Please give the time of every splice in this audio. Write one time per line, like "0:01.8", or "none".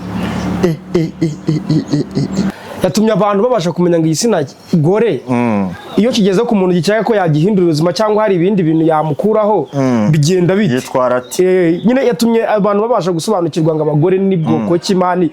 0:02.5